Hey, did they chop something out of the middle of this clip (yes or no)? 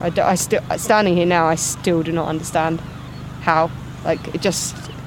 no